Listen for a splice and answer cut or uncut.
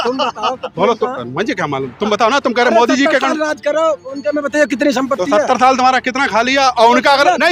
uncut